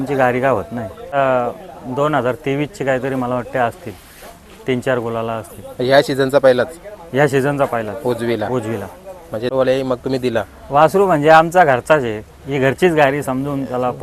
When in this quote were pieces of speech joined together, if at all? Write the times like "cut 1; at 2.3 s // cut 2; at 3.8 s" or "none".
cut 1; at 1.1 s // cut 2; at 9.5 s